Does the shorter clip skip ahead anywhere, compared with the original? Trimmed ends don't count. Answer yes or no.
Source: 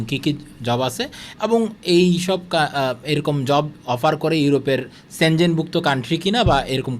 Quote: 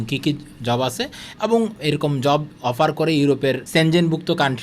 yes